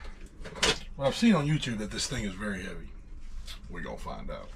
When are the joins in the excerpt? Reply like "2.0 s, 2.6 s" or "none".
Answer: none